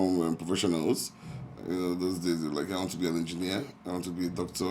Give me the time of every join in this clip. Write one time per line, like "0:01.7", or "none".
none